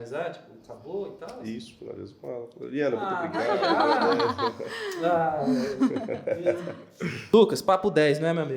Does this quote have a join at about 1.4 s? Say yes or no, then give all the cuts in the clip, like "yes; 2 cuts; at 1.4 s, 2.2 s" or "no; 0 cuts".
no; 1 cut; at 7.2 s